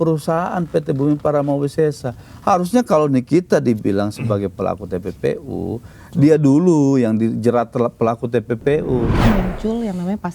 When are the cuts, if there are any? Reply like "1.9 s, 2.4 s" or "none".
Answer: 9.2 s